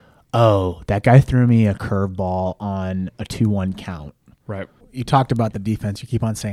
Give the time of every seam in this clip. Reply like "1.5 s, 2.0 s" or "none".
4.8 s